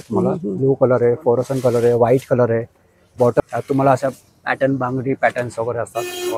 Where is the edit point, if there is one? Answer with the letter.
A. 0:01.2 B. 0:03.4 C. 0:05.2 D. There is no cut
B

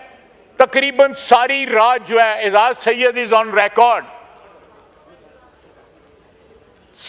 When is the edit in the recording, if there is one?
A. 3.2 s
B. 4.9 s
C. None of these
C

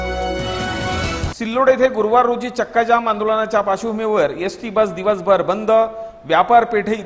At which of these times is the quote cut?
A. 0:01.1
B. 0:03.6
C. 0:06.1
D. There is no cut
D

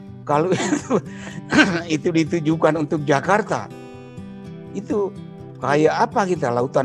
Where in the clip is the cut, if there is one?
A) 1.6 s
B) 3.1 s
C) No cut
C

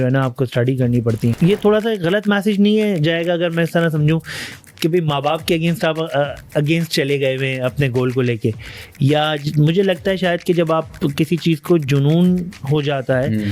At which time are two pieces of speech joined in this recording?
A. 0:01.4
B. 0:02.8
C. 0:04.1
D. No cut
A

